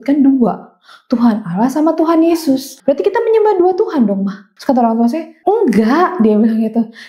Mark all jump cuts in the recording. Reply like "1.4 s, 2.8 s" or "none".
2.7 s, 4.5 s, 5.3 s